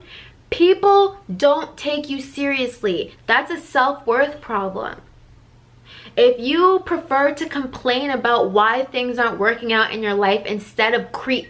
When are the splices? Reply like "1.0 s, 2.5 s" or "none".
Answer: 3.1 s